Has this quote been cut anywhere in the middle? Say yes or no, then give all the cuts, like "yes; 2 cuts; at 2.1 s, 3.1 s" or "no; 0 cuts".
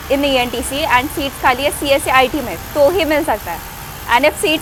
no; 0 cuts